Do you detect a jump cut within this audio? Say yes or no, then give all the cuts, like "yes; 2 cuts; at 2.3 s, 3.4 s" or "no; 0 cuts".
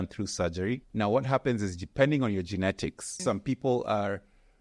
yes; 2 cuts; at 0.9 s, 3.2 s